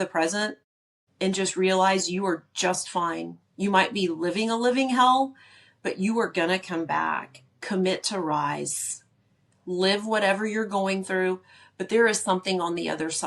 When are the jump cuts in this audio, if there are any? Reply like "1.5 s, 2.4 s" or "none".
none